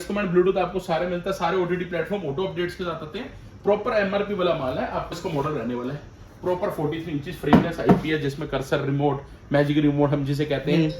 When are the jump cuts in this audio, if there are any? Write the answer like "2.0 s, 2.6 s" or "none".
5.1 s

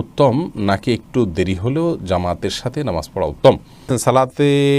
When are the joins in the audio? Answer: 3.9 s

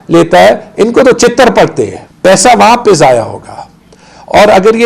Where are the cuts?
2.0 s

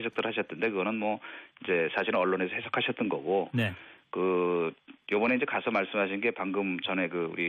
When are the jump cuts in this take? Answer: 6.4 s

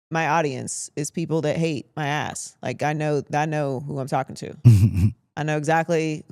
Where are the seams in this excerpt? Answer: none

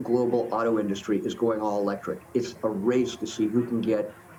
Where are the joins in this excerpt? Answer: none

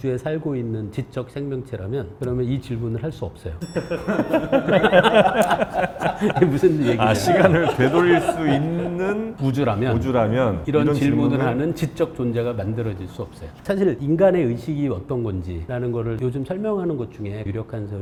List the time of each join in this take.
none

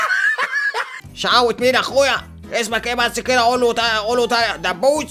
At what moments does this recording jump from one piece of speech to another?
1.0 s

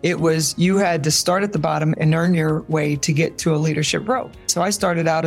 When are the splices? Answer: 2.0 s, 4.5 s

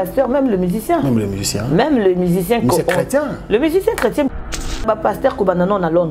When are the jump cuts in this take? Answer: 4.8 s

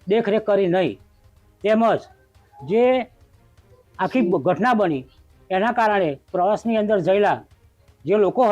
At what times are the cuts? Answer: none

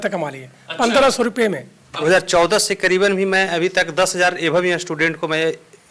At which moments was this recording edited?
1.9 s

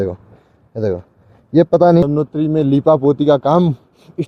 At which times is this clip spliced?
2.1 s

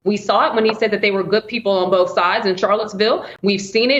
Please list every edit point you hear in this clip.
none

